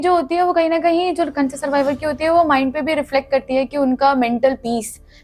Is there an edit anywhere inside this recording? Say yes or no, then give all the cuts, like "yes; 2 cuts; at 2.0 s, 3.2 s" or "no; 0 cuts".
no; 0 cuts